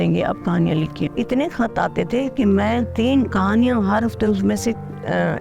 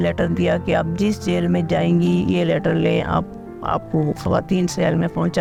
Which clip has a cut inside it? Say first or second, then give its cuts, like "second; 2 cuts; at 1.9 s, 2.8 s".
first; 1 cut; at 0.9 s